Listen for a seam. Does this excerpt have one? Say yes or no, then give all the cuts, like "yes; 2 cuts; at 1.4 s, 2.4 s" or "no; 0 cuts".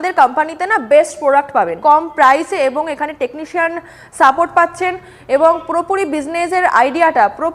yes; 1 cut; at 1.7 s